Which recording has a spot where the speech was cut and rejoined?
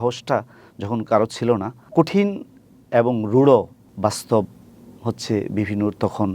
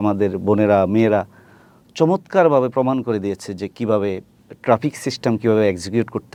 first; 2 cuts; at 1.8 s, 3.8 s

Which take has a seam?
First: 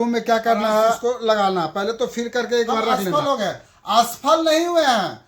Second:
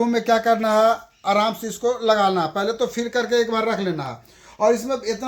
first; 2 cuts; at 1.0 s, 3.1 s

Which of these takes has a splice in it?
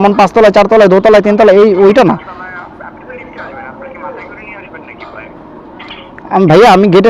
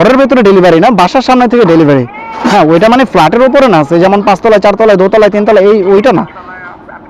second; 1 cut; at 2.5 s

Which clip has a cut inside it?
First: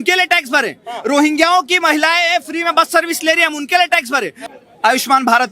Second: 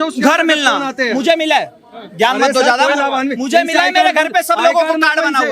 first; 1 cut; at 4.4 s

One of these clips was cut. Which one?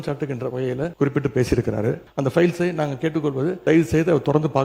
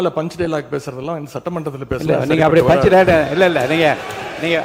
first; 3 cuts; at 0.9 s, 2.1 s, 3.6 s

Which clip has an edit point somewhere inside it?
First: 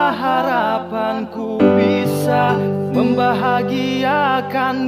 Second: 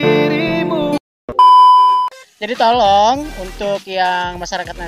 second; 2 cuts; at 1.0 s, 2.2 s

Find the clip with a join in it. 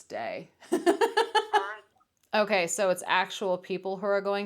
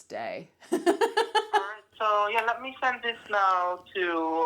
first; 1 cut; at 1.8 s

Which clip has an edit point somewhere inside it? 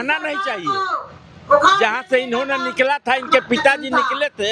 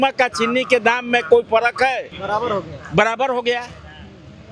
second; 1 cut; at 2.1 s

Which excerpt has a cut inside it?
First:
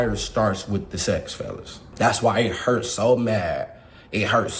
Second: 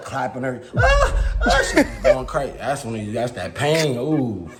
first; 1 cut; at 1.8 s

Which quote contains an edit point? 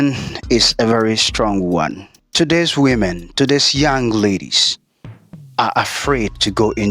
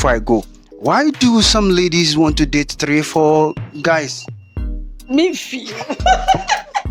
first; 1 cut; at 2.1 s

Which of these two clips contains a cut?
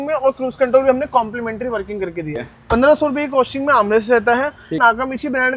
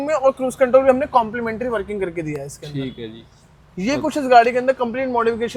first; 2 cuts; at 2.5 s, 4.8 s

